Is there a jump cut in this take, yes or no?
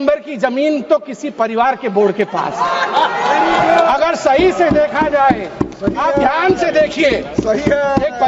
no